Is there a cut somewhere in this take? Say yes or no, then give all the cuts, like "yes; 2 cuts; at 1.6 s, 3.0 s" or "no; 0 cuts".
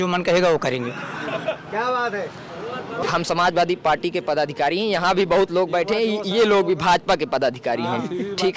yes; 1 cut; at 3.0 s